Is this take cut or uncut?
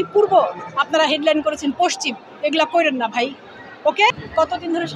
uncut